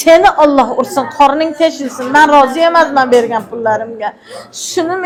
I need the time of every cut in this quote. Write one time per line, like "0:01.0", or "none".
none